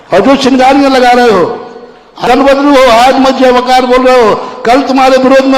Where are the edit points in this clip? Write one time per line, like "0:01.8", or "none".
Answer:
0:02.2